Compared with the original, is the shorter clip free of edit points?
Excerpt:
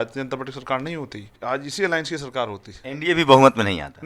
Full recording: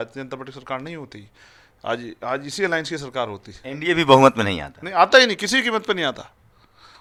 no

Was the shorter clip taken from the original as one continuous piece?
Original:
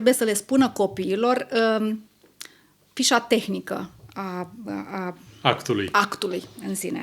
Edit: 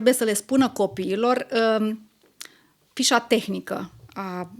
yes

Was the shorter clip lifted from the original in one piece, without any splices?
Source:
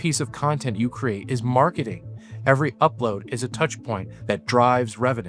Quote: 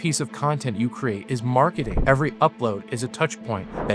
no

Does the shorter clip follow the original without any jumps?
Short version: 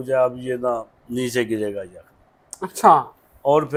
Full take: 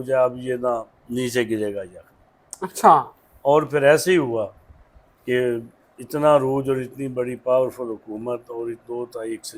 yes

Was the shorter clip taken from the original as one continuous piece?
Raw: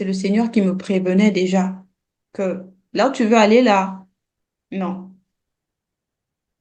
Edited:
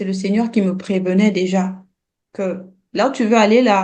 yes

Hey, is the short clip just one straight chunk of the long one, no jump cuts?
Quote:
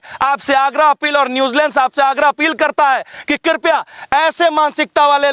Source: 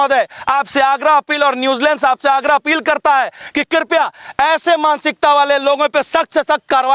yes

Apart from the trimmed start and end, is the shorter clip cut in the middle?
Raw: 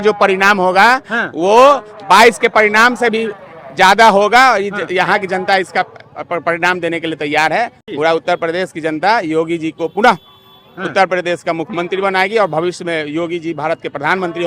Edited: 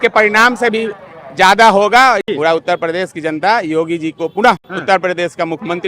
yes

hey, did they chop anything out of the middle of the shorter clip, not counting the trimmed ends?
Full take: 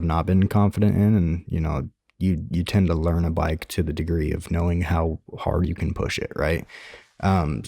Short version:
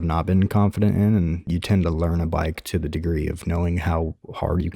yes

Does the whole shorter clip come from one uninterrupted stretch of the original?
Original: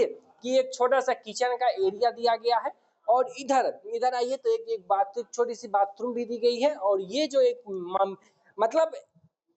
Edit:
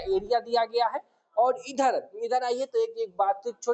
yes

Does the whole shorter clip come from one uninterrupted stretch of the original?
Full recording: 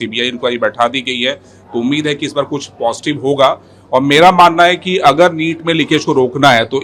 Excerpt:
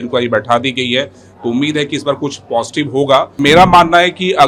no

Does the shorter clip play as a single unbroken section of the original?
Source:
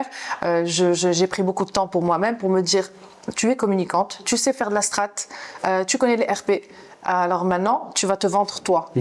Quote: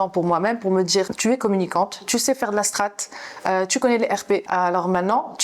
no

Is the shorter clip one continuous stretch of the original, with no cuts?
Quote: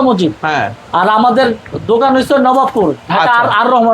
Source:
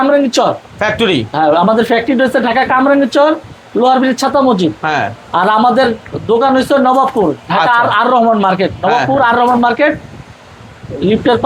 yes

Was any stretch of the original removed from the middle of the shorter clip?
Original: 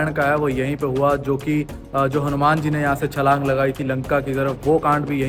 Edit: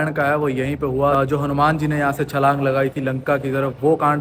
yes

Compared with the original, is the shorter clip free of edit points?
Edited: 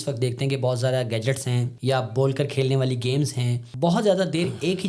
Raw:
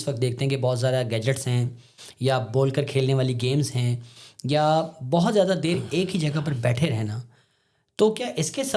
no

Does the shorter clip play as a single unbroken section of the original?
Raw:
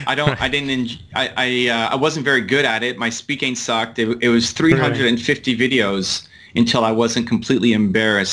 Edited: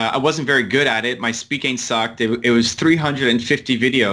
yes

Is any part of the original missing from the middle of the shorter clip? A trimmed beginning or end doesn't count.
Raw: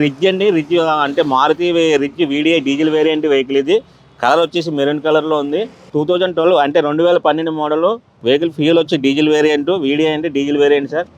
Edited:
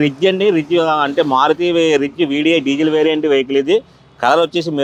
no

